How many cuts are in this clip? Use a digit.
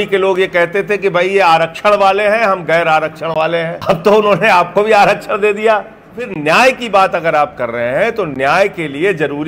2